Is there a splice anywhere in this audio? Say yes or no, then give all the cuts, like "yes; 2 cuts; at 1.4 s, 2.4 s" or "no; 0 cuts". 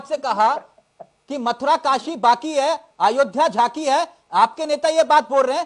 no; 0 cuts